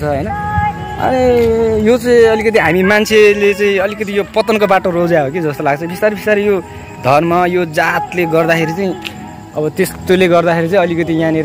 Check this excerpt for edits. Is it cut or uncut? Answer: uncut